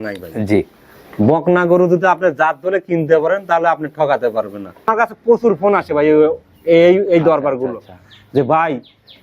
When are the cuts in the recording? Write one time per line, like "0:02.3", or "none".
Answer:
0:04.9